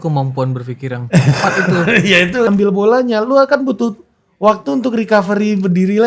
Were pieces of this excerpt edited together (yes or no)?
yes